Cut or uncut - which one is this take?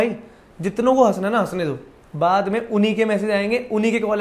uncut